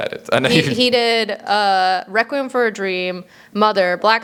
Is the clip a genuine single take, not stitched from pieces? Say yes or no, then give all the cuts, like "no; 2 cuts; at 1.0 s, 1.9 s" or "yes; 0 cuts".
yes; 0 cuts